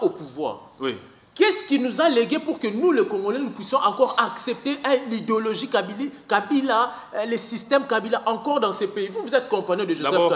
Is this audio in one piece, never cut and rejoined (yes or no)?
yes